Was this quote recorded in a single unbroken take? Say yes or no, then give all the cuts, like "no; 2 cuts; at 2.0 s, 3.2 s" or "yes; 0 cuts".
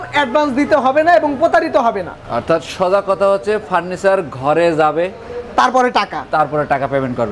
yes; 0 cuts